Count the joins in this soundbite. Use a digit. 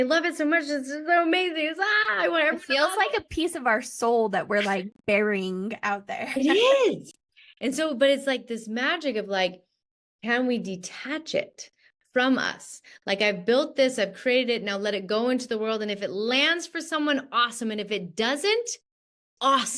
0